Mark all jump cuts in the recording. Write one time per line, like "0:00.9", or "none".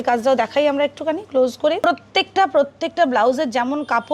0:01.8